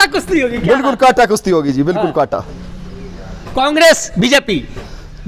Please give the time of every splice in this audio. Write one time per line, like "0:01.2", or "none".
none